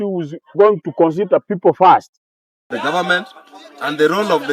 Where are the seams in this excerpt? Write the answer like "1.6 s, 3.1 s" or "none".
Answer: 2.7 s